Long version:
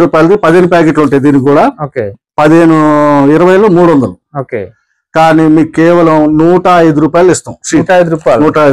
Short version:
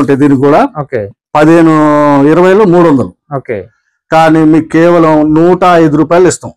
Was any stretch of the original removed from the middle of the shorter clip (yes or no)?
no